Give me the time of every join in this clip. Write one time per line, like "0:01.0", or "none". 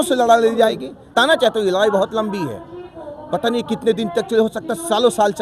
0:01.1